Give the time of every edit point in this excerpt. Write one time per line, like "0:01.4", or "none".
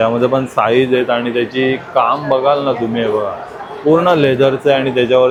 none